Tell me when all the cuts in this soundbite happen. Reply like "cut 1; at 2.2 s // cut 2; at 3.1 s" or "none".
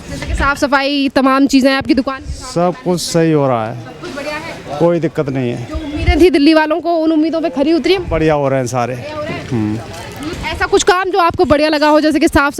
cut 1; at 10.3 s